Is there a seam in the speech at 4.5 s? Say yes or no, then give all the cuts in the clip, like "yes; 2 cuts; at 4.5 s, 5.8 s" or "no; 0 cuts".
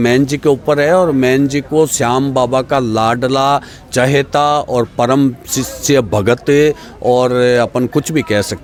no; 0 cuts